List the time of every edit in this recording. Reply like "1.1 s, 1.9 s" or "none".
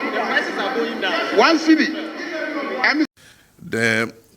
3.1 s